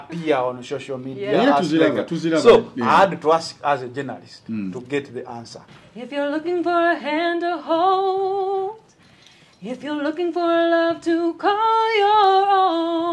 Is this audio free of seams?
no; 1 cut; at 5.6 s

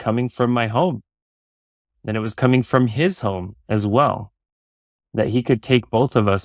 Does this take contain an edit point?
no; 0 cuts

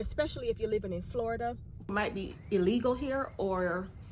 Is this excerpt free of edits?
no; 1 cut; at 1.9 s

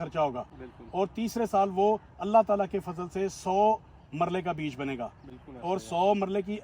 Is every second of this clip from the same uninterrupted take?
yes; 0 cuts

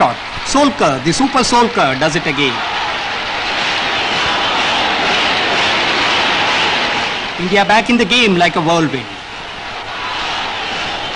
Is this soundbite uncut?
yes; 0 cuts

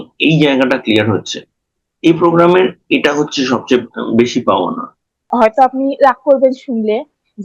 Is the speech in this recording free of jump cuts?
no; 1 cut; at 5.3 s

